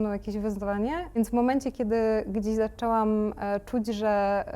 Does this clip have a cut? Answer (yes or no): yes